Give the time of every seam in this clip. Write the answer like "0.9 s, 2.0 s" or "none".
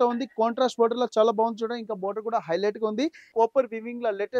3.2 s